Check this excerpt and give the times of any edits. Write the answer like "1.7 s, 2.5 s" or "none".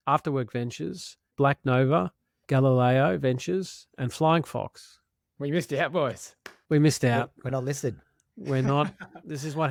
none